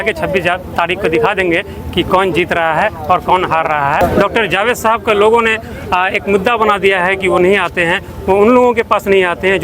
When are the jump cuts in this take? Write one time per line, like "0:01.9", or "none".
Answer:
0:04.0